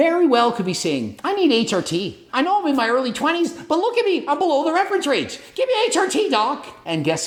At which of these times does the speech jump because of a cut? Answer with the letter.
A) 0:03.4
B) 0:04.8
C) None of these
C